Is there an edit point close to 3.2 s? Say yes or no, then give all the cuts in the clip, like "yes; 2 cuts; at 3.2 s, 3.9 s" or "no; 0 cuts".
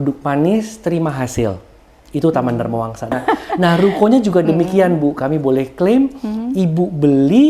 yes; 1 cut; at 3.2 s